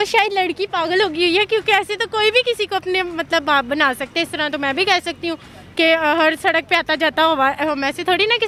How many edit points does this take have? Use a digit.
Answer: 0